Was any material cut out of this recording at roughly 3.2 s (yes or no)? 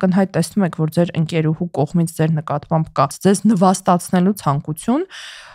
yes